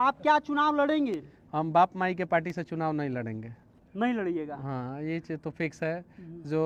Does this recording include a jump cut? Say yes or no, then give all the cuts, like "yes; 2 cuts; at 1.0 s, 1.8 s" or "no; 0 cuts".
no; 0 cuts